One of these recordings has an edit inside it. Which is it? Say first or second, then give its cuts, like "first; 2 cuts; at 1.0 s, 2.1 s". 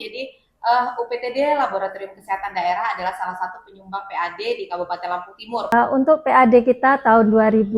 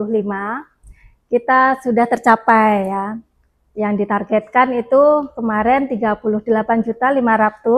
first; 1 cut; at 5.7 s